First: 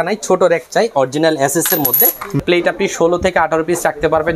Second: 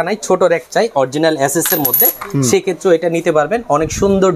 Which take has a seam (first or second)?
first